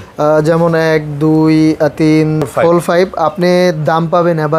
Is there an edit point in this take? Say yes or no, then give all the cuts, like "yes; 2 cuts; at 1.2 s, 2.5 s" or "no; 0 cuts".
yes; 1 cut; at 2.5 s